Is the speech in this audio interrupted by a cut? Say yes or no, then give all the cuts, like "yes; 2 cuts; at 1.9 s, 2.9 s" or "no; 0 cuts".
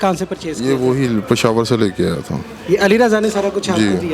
no; 0 cuts